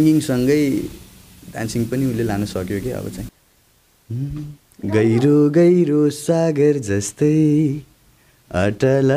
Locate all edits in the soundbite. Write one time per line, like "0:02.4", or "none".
0:03.3